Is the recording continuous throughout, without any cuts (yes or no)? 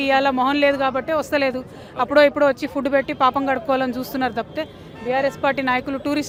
yes